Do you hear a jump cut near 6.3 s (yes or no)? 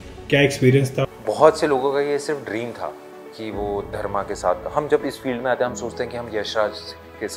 no